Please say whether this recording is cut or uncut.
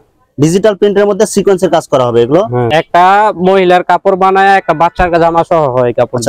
cut